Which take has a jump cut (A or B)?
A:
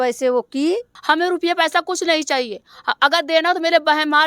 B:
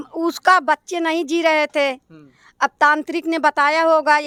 A